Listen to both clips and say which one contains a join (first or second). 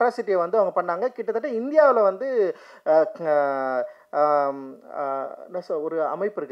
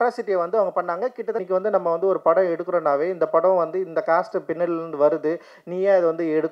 second